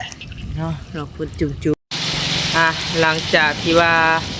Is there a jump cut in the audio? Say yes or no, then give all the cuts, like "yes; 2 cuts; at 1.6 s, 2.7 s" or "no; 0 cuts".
yes; 1 cut; at 1.7 s